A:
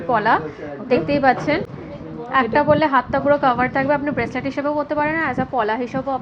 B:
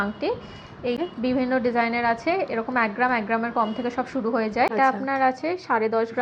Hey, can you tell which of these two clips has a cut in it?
B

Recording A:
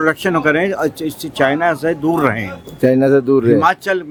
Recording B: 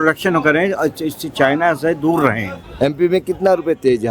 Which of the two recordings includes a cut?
B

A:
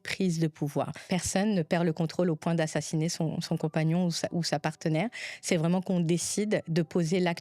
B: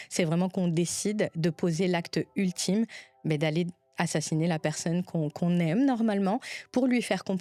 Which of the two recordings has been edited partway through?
A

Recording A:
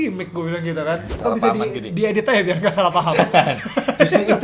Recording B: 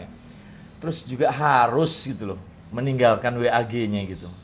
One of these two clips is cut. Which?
A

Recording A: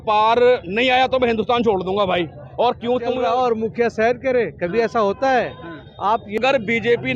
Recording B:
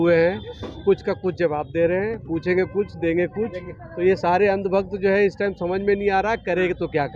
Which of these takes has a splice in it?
A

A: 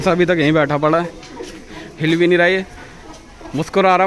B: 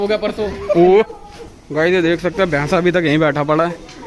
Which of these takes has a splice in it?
B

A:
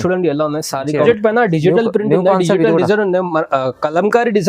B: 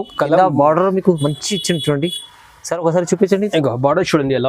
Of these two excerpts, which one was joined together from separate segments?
A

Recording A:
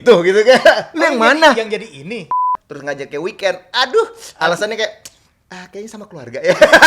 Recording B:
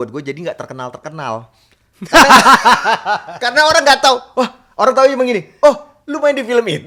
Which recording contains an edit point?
A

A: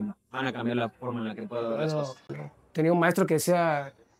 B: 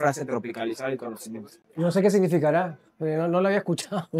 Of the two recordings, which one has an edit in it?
A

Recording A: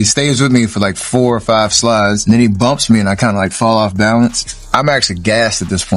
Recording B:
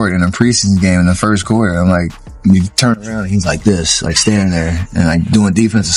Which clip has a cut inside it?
A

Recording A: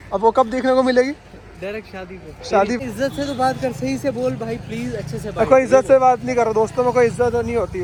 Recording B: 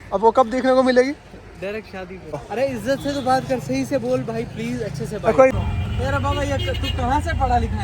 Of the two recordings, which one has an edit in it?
B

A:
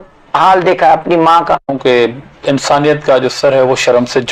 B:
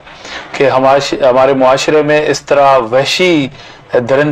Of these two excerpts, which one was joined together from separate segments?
A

